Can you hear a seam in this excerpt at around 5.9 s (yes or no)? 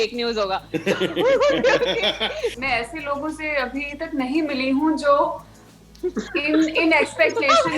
no